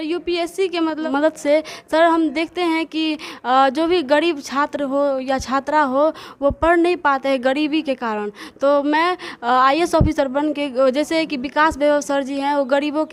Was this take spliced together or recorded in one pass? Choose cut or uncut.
cut